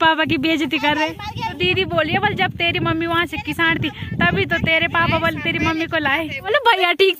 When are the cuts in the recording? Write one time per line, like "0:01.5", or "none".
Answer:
0:01.6
0:06.5